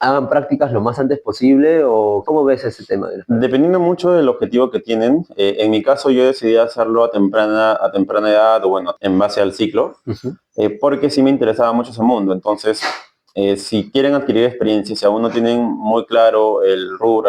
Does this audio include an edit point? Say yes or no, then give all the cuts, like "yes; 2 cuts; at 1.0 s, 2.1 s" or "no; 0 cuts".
yes; 2 cuts; at 2.2 s, 8.9 s